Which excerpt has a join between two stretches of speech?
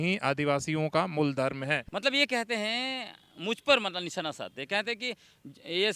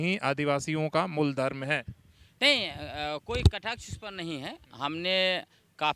first; 1 cut; at 1.9 s

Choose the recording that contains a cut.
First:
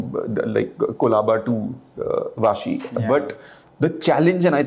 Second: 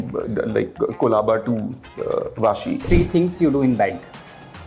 second; 1 cut; at 2.9 s

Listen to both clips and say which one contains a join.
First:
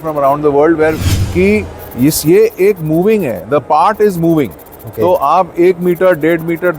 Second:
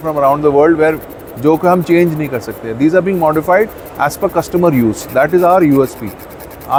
first; 1 cut; at 1.1 s

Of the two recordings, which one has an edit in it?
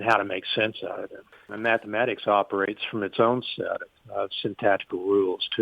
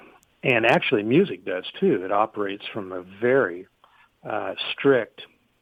first; 1 cut; at 1.4 s

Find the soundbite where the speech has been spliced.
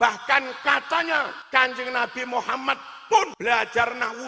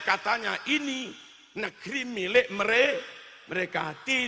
first; 2 cuts; at 1.4 s, 3.3 s

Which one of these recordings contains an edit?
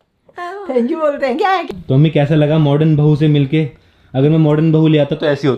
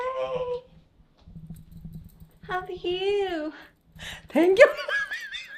first; 1 cut; at 1.7 s

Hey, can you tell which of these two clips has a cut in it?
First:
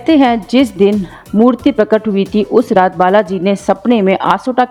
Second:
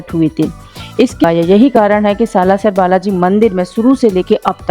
second; 1 cut; at 1.2 s

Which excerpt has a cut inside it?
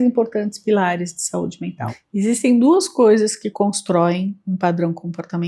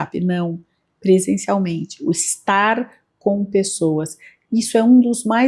first; 1 cut; at 1.8 s

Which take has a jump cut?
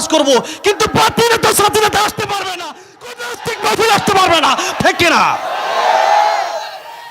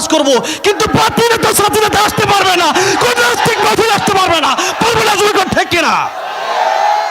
first; 1 cut; at 4.8 s

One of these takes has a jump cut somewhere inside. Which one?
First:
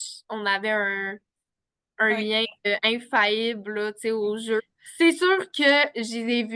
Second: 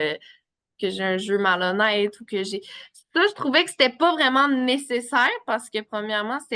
first; 1 cut; at 4.8 s

